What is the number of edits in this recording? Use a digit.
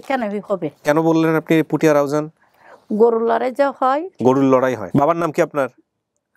2